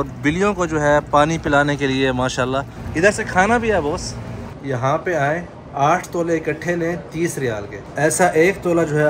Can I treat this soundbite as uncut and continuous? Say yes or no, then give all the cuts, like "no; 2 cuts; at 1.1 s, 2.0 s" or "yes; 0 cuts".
no; 3 cuts; at 2.8 s, 4.6 s, 7.8 s